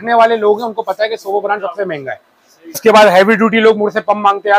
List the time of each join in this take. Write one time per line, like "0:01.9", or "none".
0:02.8